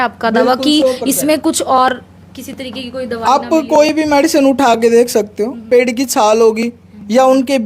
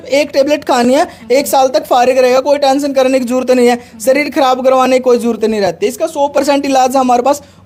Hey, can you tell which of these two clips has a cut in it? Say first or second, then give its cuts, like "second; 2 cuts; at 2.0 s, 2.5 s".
first; 1 cut; at 5.6 s